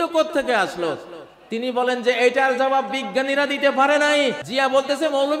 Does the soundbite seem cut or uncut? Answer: cut